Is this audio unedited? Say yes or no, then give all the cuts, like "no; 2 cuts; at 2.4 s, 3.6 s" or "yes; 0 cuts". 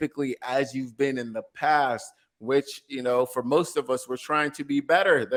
yes; 0 cuts